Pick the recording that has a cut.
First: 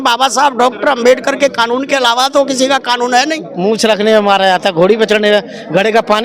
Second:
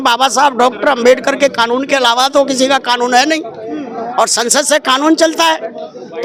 first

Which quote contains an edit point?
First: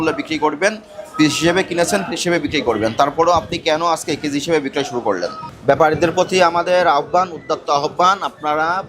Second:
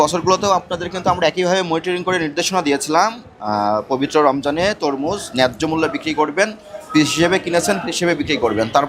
first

